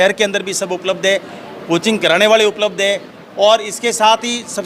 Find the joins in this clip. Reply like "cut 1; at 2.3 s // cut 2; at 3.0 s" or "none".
none